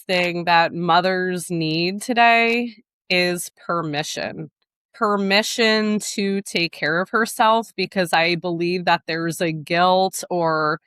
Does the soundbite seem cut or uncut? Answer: cut